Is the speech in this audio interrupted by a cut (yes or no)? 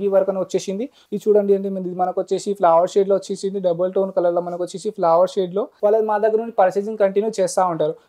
yes